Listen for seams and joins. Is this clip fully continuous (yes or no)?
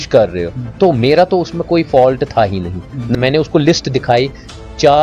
no